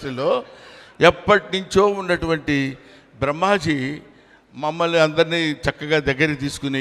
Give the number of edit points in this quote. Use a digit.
0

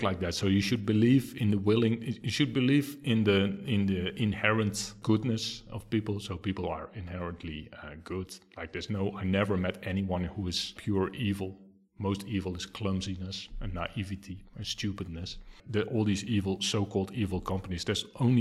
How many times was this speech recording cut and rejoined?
3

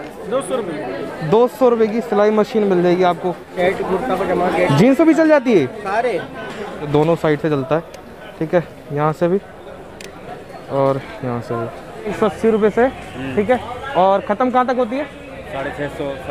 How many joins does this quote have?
3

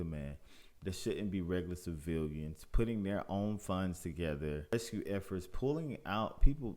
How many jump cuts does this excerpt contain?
1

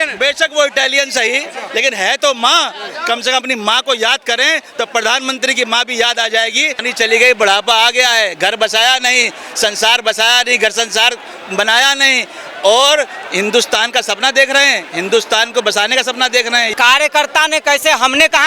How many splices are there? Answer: 2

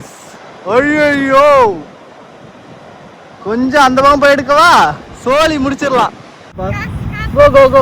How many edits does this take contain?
1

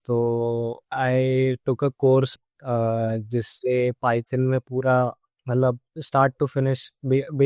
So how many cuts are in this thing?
1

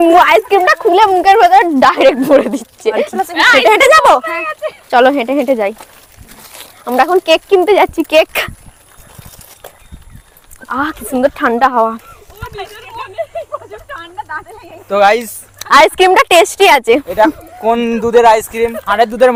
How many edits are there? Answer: 0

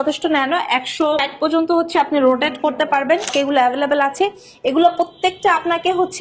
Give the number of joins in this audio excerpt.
2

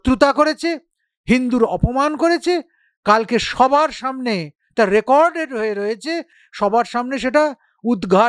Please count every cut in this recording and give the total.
0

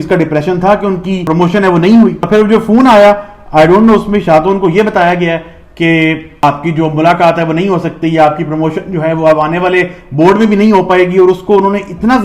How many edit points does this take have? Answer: 2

